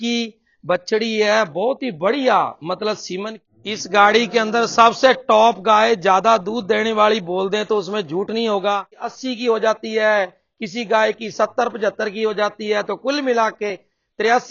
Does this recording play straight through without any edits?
no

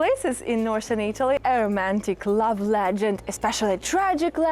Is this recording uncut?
no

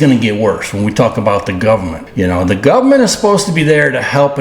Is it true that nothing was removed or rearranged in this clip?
no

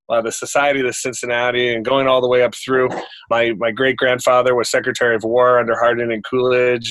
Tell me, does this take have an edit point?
yes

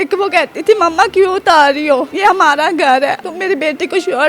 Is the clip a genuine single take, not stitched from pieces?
no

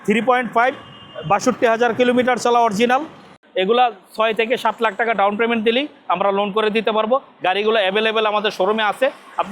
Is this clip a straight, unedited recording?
no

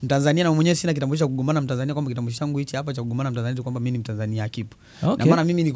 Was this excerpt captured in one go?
yes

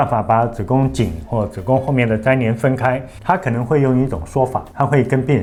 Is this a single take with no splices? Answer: yes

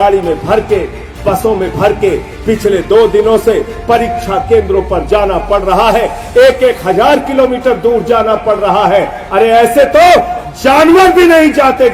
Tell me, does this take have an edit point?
no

